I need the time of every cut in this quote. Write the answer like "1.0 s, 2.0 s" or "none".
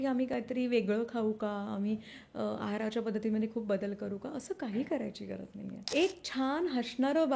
5.8 s